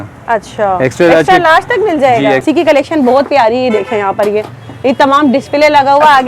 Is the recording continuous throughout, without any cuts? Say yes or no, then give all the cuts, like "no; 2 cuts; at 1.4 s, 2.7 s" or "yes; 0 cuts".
no; 1 cut; at 2.4 s